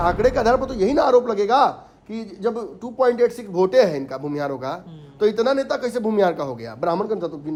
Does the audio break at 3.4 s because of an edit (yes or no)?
no